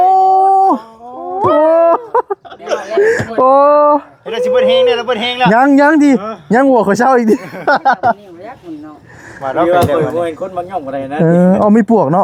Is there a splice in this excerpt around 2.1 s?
no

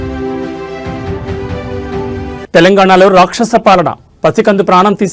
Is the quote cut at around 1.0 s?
no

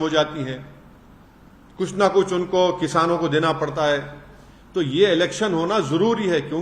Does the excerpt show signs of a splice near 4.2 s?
no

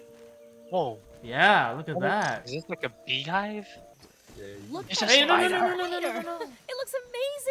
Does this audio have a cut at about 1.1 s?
no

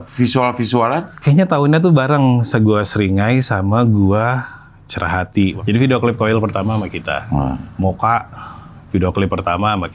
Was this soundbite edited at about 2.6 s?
no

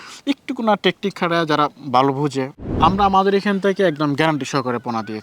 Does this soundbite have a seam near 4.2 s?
no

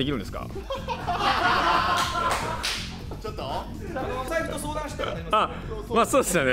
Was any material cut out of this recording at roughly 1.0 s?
no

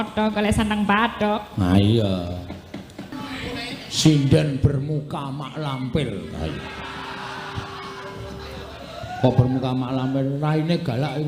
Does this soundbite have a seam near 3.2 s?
yes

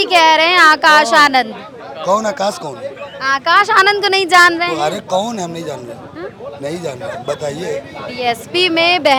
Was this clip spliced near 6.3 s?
no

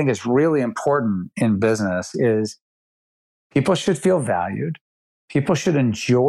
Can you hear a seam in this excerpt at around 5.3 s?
no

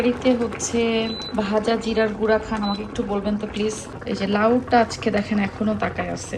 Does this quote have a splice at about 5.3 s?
no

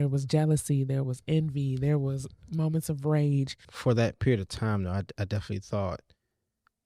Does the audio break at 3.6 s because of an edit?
yes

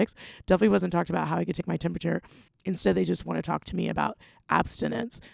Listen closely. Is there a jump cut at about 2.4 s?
yes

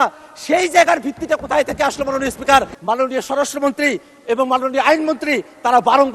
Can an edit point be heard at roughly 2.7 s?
yes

